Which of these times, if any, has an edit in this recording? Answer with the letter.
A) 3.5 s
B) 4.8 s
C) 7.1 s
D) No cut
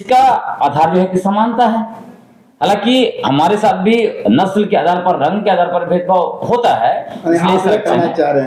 D